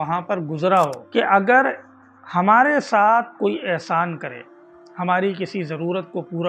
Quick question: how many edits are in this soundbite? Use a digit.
1